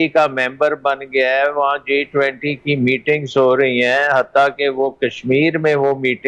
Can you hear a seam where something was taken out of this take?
no; 0 cuts

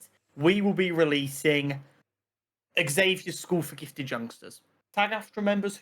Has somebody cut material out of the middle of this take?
yes; 1 cut; at 4.8 s

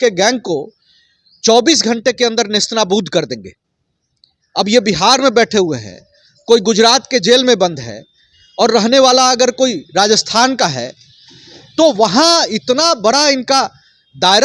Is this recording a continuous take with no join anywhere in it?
yes; 0 cuts

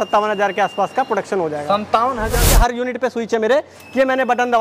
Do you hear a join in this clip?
yes; 1 cut; at 2.4 s

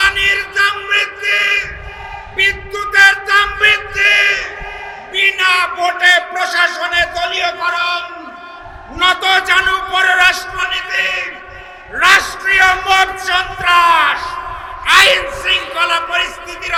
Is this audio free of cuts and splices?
yes; 0 cuts

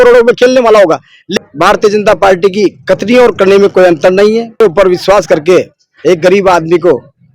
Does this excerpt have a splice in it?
yes; 2 cuts; at 1.3 s, 4.6 s

